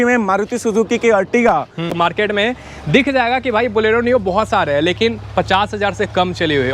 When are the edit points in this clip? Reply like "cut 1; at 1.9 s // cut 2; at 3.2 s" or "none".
cut 1; at 1.9 s

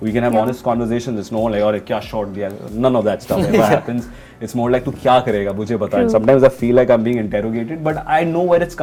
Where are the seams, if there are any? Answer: none

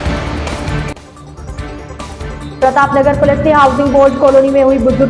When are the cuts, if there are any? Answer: cut 1; at 1.0 s // cut 2; at 2.6 s

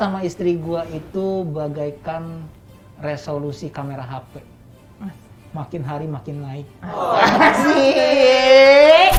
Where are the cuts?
none

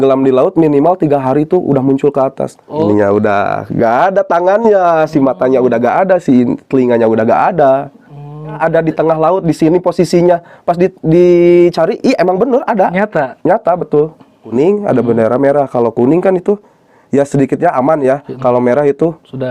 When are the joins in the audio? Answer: cut 1; at 2.8 s // cut 2; at 8.6 s // cut 3; at 14.5 s

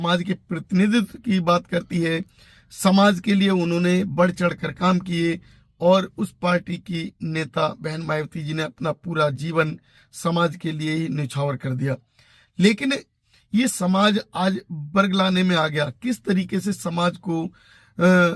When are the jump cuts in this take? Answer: none

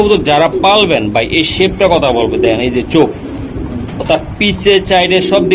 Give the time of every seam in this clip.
none

